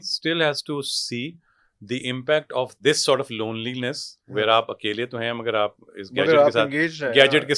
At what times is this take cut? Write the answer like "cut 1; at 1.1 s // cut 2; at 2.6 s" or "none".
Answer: none